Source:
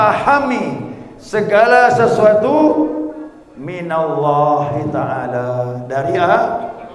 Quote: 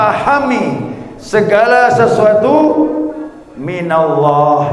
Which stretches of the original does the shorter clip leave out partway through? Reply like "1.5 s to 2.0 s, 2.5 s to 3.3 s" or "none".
none